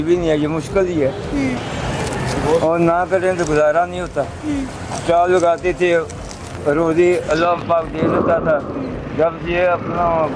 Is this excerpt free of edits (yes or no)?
yes